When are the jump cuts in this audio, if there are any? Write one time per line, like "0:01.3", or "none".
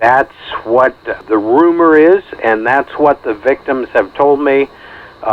0:01.2